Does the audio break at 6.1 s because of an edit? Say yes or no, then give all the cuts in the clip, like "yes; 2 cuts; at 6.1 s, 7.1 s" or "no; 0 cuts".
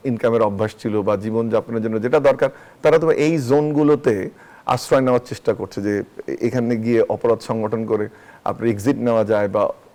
no; 0 cuts